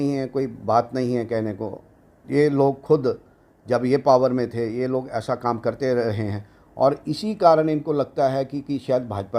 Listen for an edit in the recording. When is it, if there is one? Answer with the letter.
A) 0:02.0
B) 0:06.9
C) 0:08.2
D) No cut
D